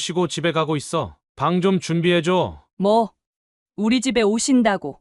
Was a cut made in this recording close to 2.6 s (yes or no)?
yes